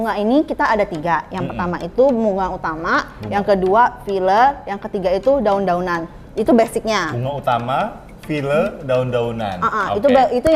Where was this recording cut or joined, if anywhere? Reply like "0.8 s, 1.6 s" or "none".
none